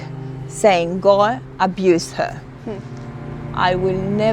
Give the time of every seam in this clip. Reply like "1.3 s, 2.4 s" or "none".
3.3 s